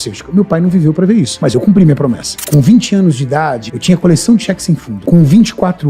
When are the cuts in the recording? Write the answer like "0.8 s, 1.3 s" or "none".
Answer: 1.4 s, 2.3 s, 3.7 s, 4.9 s